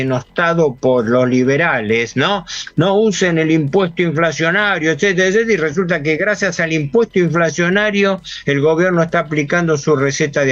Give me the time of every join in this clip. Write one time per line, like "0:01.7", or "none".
none